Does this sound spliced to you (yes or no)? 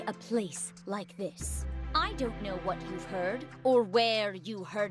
yes